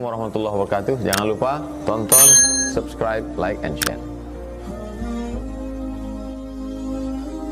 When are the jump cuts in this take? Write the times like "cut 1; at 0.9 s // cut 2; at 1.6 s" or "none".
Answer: none